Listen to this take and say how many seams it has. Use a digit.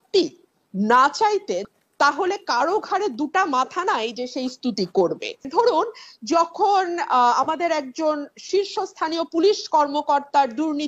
2